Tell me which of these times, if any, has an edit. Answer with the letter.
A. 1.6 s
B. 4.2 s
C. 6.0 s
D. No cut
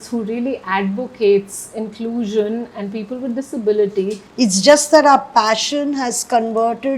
B